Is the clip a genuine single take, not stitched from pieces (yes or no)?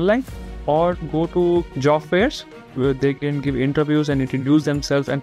no